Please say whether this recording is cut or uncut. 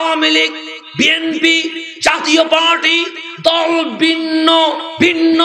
uncut